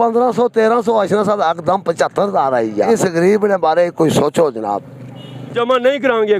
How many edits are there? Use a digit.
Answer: 2